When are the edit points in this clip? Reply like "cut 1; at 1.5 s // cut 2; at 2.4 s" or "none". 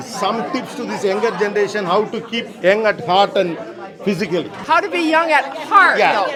none